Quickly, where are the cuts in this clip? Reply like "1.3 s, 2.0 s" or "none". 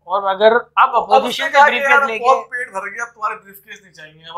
none